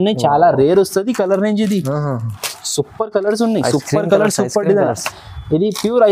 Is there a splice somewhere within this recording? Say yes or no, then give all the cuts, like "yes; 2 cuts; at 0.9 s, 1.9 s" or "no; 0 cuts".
no; 0 cuts